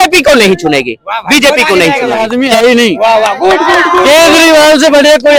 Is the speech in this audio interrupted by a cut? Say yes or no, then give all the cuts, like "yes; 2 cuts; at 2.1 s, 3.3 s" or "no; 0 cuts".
no; 0 cuts